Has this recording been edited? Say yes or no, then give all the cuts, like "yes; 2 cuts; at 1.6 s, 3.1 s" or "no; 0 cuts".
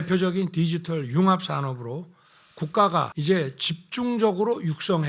yes; 1 cut; at 3.1 s